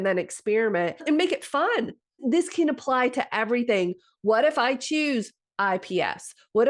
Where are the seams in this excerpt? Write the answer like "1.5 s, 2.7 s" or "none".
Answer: 1.0 s, 2.2 s